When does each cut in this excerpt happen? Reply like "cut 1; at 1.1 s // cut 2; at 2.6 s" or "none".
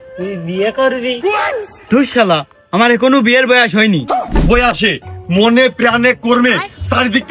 cut 1; at 4.3 s